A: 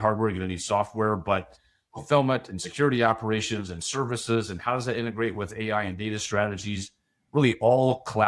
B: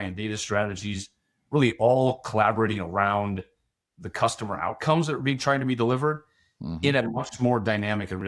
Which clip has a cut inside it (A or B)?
A